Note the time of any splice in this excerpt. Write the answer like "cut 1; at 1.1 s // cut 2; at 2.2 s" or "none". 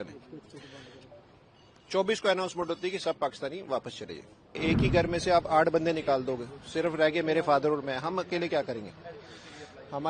cut 1; at 4.6 s